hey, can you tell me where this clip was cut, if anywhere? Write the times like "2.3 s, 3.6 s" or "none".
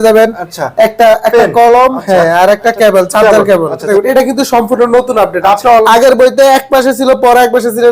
3.9 s, 5.8 s